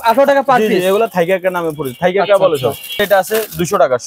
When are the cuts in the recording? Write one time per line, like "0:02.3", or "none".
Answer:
0:03.0